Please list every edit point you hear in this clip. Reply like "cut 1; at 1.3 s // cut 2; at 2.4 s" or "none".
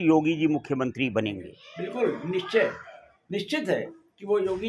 none